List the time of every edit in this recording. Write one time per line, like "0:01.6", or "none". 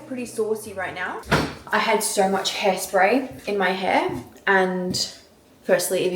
0:01.2